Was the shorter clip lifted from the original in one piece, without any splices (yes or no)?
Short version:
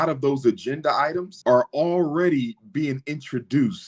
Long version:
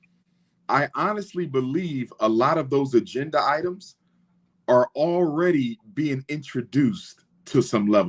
no